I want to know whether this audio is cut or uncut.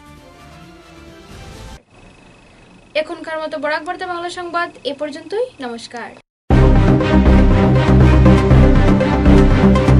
uncut